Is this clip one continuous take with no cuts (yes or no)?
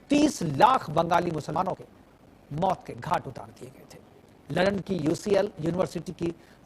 no